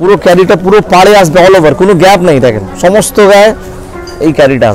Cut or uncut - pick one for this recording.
uncut